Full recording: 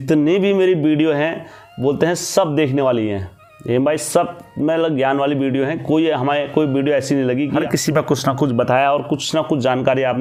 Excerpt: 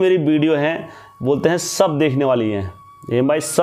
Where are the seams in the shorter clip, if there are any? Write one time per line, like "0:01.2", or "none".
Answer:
none